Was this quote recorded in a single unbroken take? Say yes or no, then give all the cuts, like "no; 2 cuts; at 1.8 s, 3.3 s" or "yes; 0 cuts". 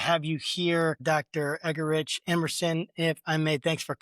no; 1 cut; at 1.0 s